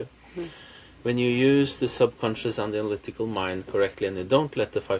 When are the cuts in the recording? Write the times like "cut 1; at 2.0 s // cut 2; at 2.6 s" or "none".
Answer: none

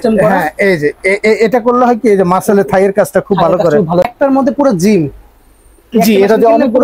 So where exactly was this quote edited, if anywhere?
cut 1; at 4.0 s

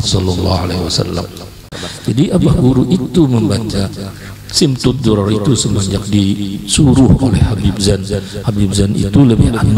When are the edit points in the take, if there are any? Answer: cut 1; at 1.9 s

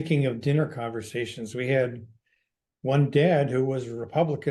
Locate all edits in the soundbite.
none

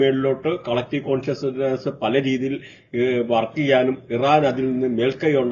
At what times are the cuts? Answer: none

